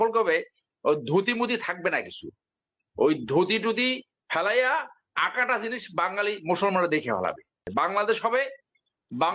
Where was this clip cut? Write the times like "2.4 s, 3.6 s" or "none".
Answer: 7.6 s